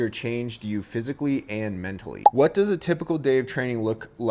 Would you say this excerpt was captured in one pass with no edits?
no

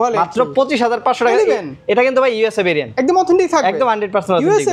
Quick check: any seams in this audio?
no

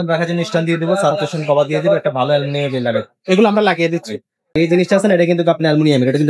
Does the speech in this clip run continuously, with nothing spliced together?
no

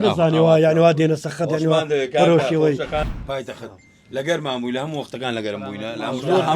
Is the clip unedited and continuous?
no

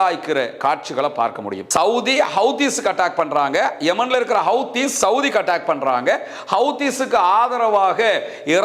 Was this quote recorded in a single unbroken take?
no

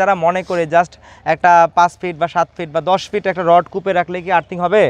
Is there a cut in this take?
no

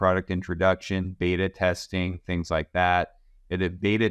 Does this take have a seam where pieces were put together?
no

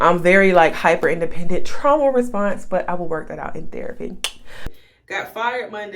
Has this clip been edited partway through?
yes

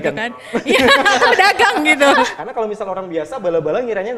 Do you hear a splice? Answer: yes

